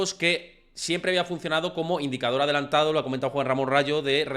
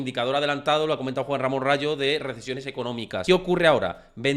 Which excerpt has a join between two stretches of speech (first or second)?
second